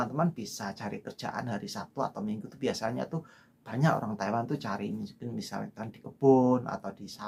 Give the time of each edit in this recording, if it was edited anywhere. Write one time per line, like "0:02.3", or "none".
none

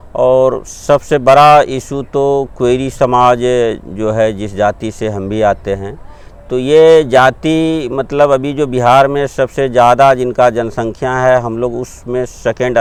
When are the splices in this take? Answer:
none

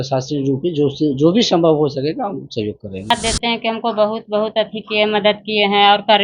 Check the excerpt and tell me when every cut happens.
0:03.1

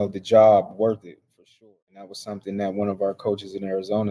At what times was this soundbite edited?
0:01.7

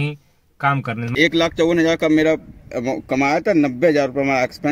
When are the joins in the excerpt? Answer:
0:01.1

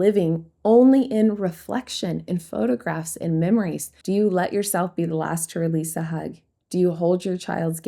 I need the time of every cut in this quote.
0:03.9

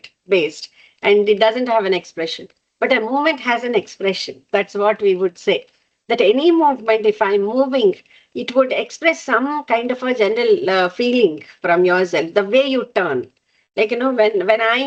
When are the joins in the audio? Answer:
none

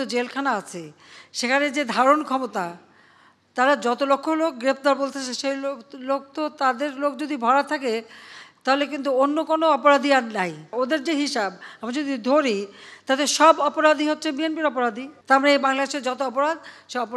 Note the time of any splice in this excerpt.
0:10.7
0:15.1

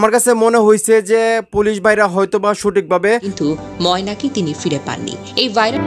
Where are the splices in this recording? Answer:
0:03.3

